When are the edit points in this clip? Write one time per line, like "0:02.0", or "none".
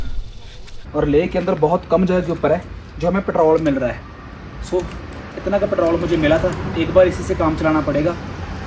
0:00.9